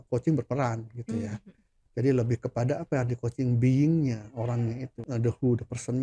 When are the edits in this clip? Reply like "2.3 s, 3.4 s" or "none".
4.9 s